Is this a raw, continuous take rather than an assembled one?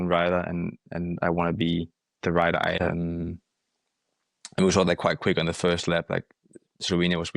no; 1 cut; at 2.8 s

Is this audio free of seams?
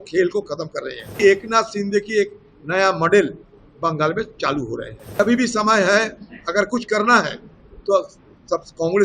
no; 2 cuts; at 1.1 s, 5.2 s

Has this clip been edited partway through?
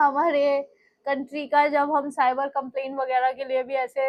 no; 0 cuts

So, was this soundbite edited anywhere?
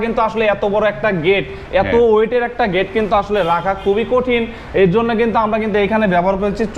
no; 0 cuts

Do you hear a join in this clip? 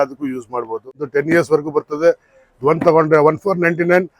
yes; 1 cut; at 1.0 s

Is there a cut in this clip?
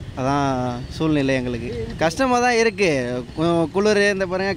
yes; 1 cut; at 1.9 s

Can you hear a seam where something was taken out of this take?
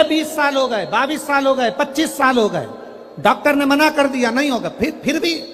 no; 0 cuts

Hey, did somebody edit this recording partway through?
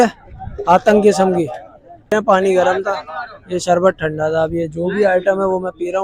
yes; 1 cut; at 2.2 s

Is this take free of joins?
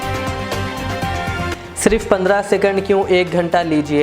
no; 1 cut; at 1.5 s

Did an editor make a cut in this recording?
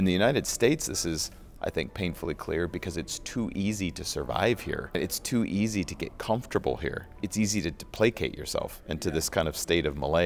yes; 2 cuts; at 5.0 s, 7.2 s

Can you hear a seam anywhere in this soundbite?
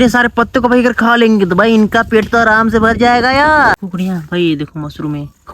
yes; 1 cut; at 3.7 s

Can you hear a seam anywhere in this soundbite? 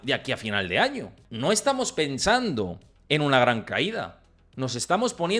yes; 1 cut; at 1.2 s

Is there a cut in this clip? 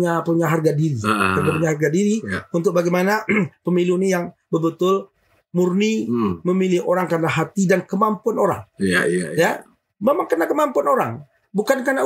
no; 0 cuts

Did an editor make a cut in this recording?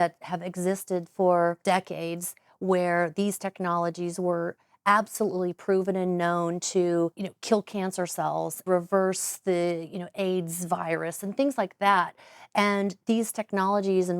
yes; 3 cuts; at 1.6 s, 7.3 s, 8.6 s

